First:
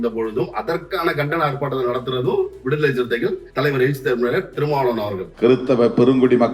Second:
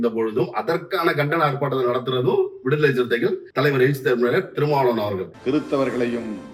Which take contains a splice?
first; 1 cut; at 5.3 s

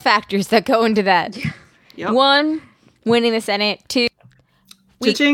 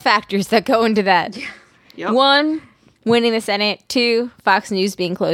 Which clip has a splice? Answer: second; 1 cut; at 4.0 s

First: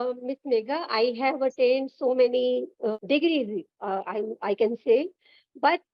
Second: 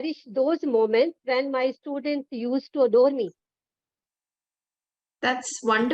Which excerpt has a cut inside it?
first; 1 cut; at 2.9 s

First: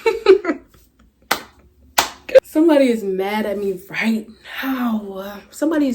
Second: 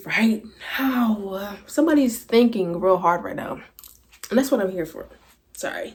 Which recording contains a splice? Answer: first; 1 cut; at 2.4 s

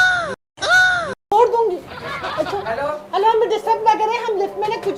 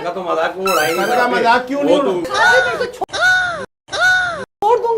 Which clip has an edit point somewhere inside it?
second; 1 cut; at 2.2 s

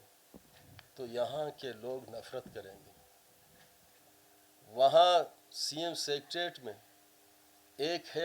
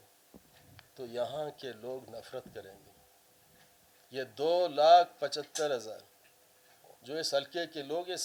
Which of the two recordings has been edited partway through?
first; 1 cut; at 3.9 s

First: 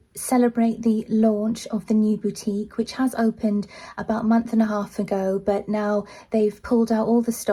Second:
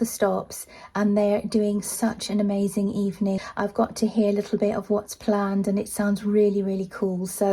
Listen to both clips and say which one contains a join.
second; 1 cut; at 3.4 s

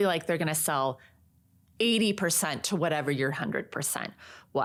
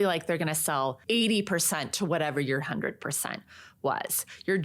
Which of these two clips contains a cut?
second; 1 cut; at 1.0 s

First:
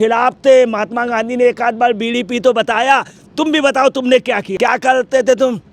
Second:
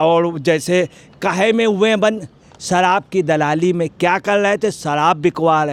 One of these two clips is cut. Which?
first; 1 cut; at 4.5 s

